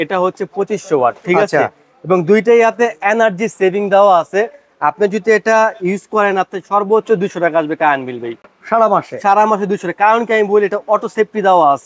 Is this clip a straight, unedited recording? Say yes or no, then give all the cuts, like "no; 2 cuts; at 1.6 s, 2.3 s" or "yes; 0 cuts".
yes; 0 cuts